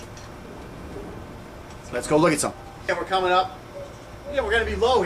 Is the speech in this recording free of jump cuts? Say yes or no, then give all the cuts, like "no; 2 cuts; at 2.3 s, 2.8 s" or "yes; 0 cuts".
no; 1 cut; at 2.8 s